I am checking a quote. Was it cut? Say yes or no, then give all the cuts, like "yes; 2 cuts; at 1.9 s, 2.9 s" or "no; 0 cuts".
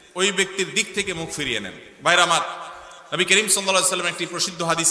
no; 0 cuts